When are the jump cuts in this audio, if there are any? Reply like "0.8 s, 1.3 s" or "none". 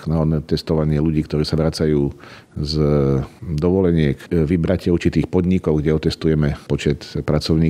4.2 s, 6.6 s